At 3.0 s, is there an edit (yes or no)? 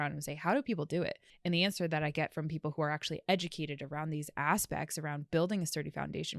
no